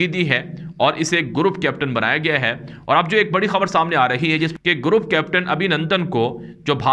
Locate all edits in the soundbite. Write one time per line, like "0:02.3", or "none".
0:04.5